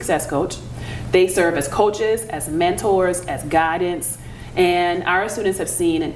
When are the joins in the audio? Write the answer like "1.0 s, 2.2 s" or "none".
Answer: none